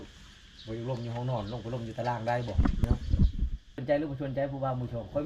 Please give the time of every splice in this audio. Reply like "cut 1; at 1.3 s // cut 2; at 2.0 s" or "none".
cut 1; at 2.8 s // cut 2; at 3.8 s